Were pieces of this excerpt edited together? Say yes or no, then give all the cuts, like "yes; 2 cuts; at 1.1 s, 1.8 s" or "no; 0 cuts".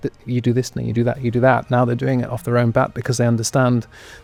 no; 0 cuts